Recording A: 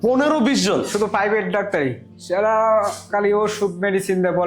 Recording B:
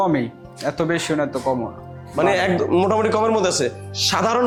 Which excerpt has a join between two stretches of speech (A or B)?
A